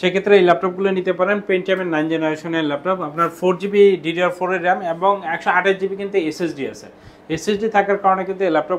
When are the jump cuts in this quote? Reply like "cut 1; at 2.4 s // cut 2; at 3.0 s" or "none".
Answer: none